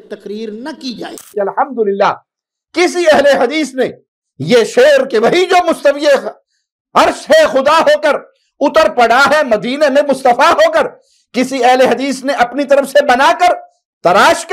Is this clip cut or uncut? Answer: cut